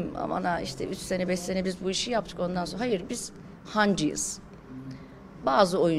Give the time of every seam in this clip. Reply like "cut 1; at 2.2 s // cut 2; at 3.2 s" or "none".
none